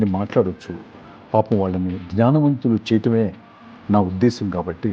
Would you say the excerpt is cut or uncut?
uncut